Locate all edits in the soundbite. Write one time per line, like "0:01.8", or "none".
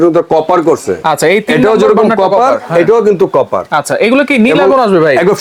none